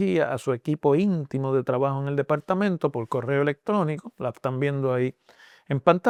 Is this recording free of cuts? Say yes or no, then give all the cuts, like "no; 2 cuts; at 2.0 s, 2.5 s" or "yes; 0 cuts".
yes; 0 cuts